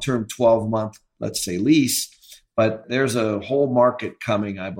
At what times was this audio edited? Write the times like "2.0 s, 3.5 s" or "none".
2.8 s